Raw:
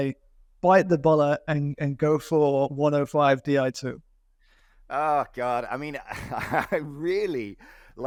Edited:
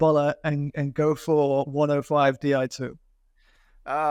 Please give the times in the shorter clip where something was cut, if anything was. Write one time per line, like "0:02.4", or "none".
none